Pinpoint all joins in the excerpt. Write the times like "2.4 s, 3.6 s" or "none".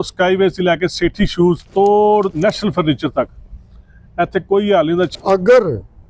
1.7 s, 2.3 s, 5.1 s